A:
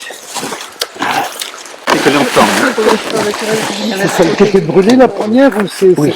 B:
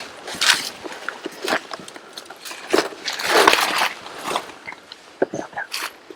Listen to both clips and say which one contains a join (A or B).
A